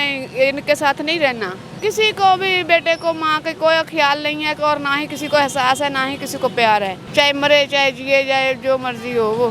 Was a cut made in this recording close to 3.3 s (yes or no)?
no